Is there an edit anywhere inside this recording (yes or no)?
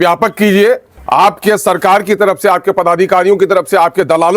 yes